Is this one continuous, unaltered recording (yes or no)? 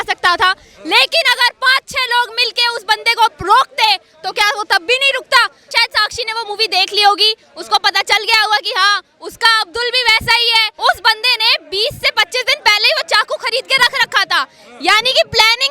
no